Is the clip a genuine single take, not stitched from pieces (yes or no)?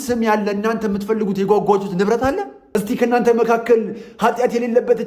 no